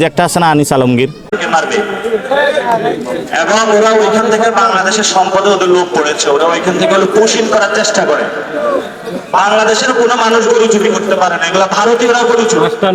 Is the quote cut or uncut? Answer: uncut